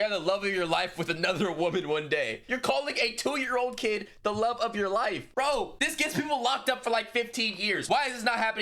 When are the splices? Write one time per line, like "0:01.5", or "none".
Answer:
none